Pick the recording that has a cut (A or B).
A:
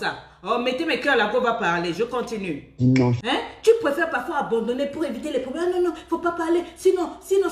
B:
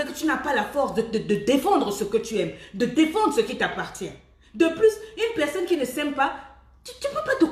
A